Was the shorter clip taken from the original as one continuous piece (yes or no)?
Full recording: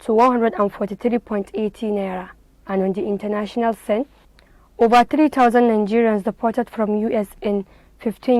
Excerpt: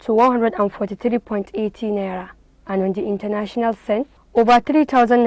no